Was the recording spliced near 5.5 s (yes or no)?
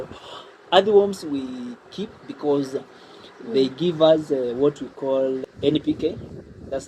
yes